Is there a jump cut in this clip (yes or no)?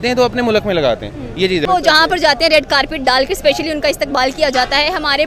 yes